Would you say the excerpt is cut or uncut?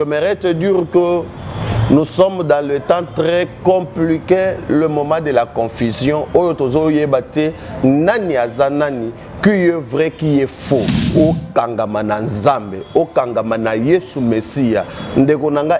cut